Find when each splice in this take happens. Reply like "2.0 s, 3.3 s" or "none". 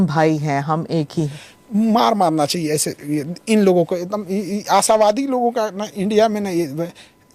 1.3 s, 3.3 s

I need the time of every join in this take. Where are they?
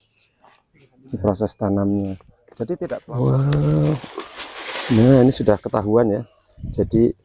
2.7 s

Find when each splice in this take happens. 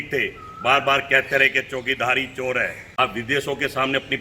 2.8 s

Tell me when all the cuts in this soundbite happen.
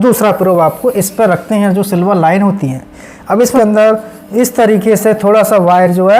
3.5 s

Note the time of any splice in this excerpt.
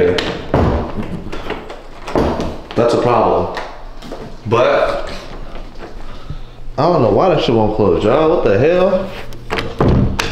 none

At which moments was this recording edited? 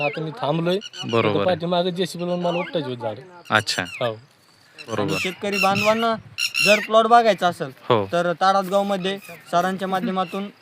4.9 s

